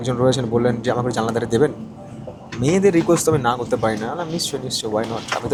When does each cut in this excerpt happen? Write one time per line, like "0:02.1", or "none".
none